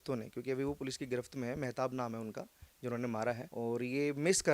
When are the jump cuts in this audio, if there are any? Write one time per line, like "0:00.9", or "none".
0:03.5